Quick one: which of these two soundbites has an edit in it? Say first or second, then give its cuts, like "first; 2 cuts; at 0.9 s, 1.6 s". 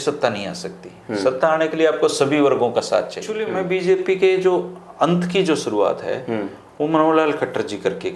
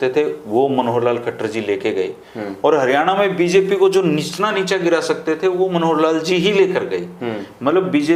first; 1 cut; at 3.5 s